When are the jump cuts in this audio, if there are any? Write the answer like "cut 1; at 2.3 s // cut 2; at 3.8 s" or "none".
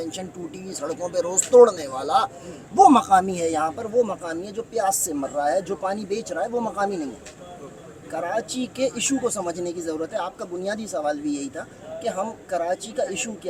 none